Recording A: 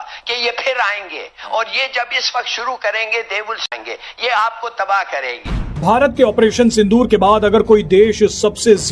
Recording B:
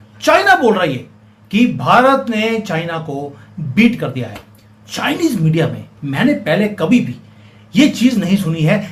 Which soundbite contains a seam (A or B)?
A